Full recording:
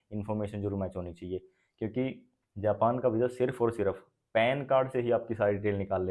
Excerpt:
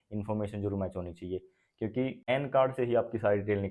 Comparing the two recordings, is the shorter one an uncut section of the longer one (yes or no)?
no